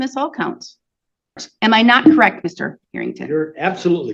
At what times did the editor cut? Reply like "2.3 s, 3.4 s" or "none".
1.3 s